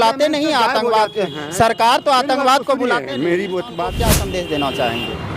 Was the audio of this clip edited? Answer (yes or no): yes